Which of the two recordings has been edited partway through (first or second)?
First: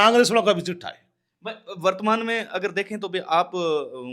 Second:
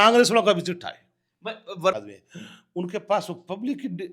second